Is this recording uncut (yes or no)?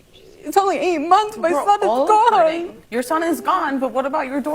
no